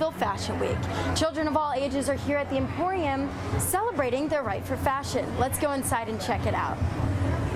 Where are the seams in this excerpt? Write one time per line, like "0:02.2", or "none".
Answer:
none